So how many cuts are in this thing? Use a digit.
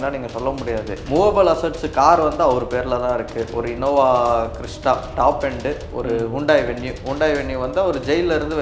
1